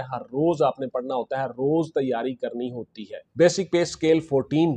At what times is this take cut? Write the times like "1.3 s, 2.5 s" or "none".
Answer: 3.4 s